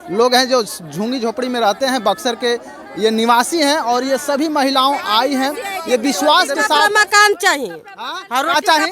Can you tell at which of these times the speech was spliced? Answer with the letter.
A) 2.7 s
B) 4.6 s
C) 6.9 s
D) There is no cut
C